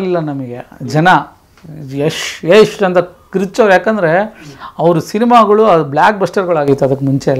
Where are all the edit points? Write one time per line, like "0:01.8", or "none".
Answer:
none